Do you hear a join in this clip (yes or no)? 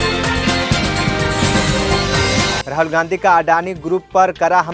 yes